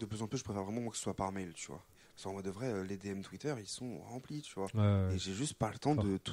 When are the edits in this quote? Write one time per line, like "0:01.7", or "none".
0:02.0